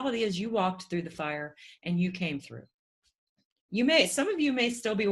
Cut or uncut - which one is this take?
uncut